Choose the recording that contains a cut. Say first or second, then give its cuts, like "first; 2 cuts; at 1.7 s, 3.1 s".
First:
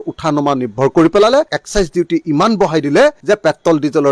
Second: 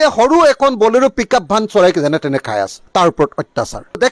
first; 1 cut; at 1.5 s